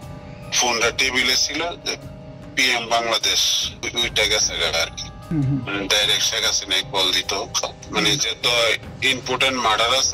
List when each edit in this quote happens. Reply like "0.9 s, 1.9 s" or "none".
3.8 s, 5.3 s, 7.8 s